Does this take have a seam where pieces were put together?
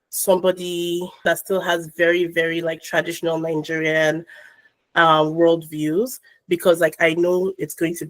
yes; 1 cut; at 1.2 s

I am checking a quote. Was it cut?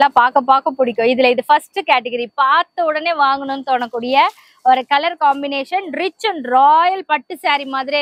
no; 0 cuts

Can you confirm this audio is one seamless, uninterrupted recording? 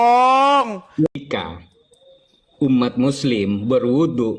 no; 1 cut; at 1.2 s

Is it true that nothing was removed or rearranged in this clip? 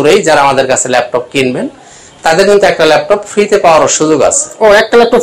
yes; 0 cuts

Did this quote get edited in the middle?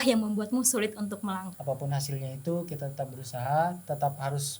yes; 1 cut; at 1.5 s

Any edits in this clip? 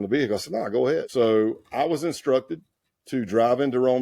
yes; 1 cut; at 1.1 s

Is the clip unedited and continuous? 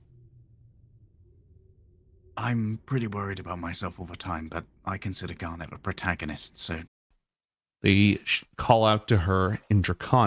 no; 1 cut; at 7.0 s

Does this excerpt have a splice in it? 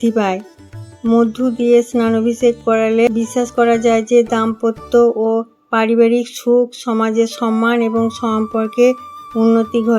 yes; 1 cut; at 3.1 s

